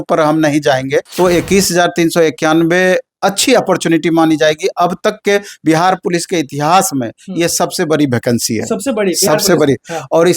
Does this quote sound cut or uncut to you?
cut